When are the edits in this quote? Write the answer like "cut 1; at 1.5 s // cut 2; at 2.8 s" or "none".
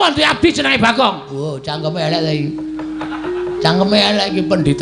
none

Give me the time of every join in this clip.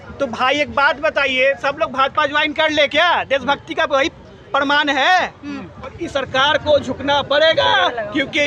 cut 1; at 6.0 s

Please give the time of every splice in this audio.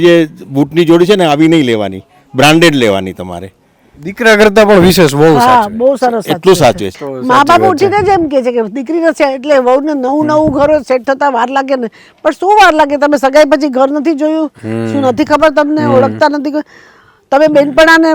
cut 1; at 6.9 s

